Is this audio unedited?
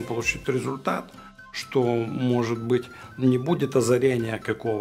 no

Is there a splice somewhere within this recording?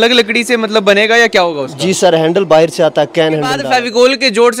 yes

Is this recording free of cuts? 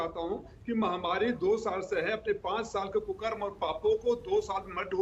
yes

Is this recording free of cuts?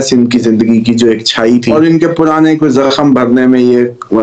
no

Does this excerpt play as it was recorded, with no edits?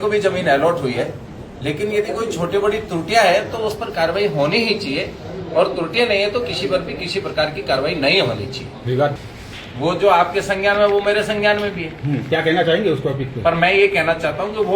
no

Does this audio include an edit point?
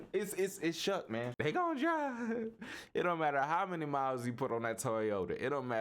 yes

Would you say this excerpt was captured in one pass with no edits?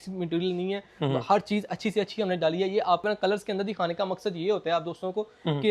no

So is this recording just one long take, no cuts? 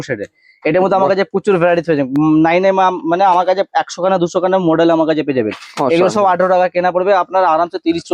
yes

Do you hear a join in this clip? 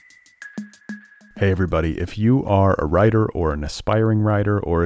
yes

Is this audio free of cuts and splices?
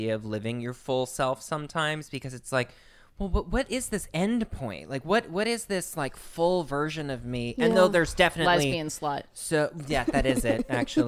yes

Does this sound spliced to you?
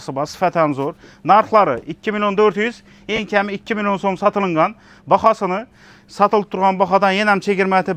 no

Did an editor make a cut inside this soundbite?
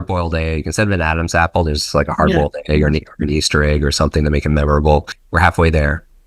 yes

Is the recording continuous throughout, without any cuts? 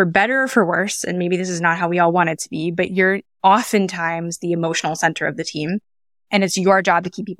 no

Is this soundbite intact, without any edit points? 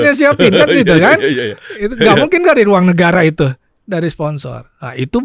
yes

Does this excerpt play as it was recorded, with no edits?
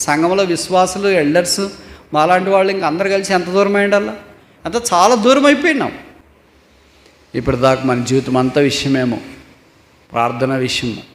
no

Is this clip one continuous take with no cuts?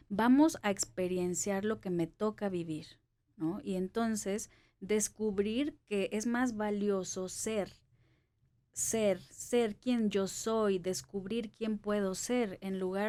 yes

